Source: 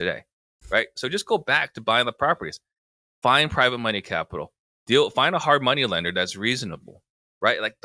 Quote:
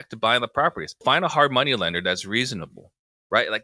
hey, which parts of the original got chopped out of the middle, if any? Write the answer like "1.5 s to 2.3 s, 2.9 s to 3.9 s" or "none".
2.7 s to 5.1 s

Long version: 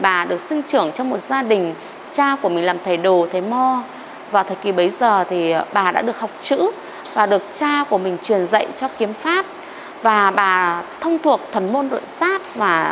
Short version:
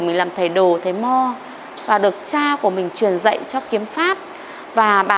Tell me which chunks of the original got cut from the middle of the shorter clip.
4.1 s to 6.9 s

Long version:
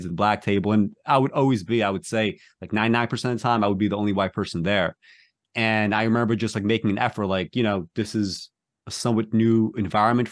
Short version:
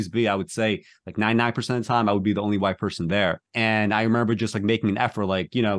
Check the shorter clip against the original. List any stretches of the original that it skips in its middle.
5.0 s to 5.5 s

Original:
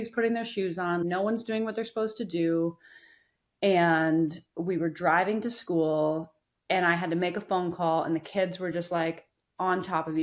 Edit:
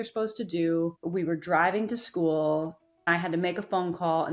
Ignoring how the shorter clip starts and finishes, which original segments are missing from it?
2.8 s to 4.5 s, 6.6 s to 6.9 s

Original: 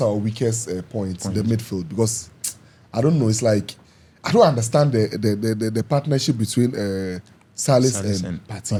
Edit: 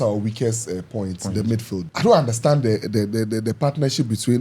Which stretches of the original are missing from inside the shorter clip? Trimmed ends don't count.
1.8 s to 4.1 s

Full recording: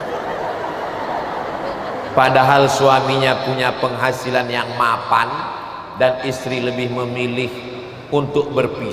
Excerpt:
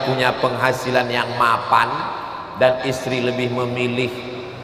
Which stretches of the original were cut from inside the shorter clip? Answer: none

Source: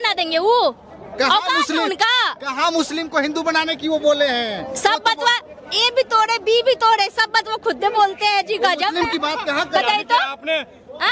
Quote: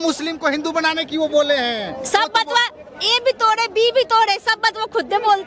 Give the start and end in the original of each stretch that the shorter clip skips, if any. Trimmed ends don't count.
none

